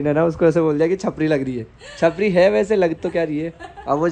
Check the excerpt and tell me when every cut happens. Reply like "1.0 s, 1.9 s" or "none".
none